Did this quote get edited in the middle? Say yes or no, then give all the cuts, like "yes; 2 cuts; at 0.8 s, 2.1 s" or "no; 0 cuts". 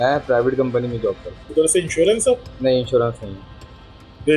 yes; 1 cut; at 1.5 s